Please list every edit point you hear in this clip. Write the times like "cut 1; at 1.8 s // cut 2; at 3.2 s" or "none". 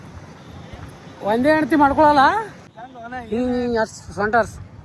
cut 1; at 2.6 s